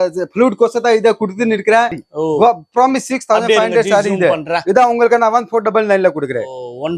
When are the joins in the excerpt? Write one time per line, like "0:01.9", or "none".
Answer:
0:02.0